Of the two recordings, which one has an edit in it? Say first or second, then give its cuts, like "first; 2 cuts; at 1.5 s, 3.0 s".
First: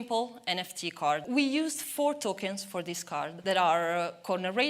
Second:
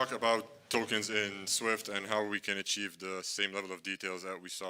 first; 2 cuts; at 1.2 s, 3.3 s